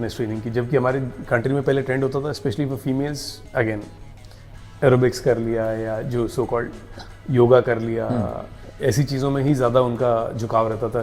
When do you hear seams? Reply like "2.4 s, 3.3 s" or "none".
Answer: none